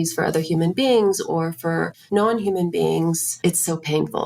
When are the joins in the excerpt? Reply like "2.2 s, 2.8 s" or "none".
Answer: 2.0 s, 3.3 s